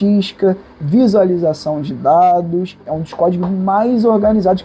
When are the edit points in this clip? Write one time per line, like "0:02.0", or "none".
0:02.8